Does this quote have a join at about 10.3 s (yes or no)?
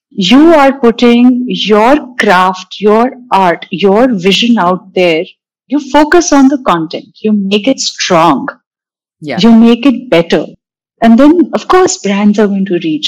no